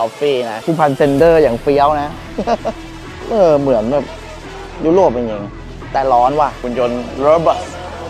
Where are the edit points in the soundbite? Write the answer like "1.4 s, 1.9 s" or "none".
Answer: 6.6 s